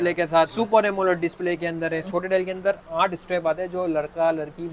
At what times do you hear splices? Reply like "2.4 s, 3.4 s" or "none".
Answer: 2.1 s